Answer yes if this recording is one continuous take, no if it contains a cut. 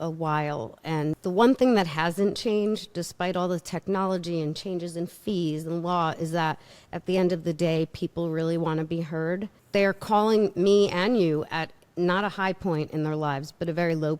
no